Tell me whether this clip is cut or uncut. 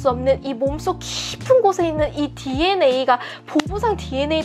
uncut